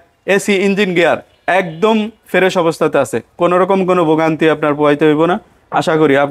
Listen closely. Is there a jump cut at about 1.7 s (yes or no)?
no